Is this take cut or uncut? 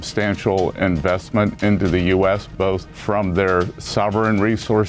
cut